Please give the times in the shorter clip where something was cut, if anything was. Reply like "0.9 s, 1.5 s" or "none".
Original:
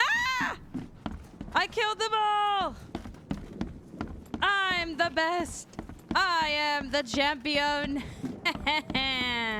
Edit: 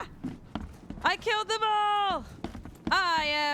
2.6 s